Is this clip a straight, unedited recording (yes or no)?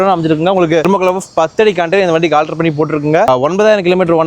no